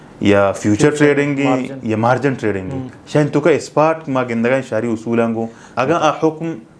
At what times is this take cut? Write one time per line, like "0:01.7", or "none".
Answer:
0:05.6